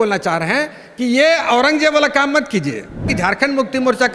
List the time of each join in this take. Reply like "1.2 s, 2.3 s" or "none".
3.1 s

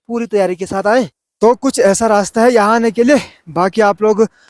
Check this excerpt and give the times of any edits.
1.2 s

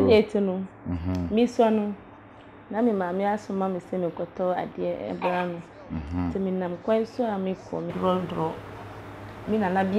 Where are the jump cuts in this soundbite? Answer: 7.9 s

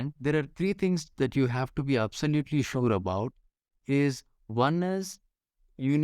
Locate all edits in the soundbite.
none

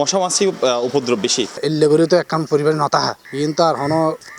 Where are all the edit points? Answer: 1.5 s

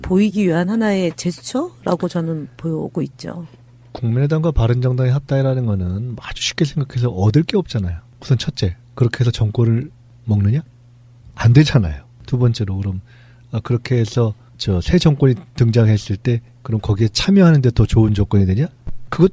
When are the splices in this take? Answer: none

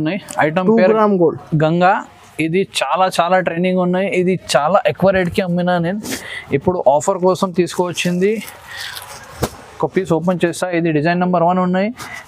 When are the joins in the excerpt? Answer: none

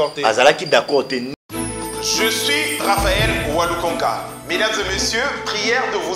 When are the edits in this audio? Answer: 1.3 s

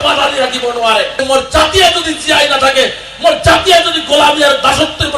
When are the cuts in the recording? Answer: 1.2 s

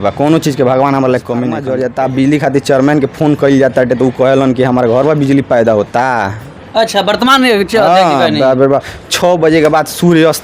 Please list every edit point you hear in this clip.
1.7 s

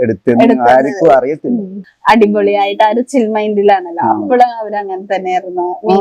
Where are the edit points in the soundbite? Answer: 1.9 s

